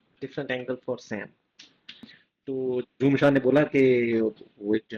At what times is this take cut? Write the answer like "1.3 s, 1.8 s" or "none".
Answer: 2.2 s